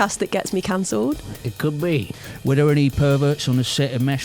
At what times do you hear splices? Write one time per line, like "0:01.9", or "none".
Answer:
0:02.1